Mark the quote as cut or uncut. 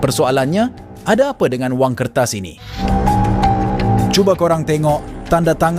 cut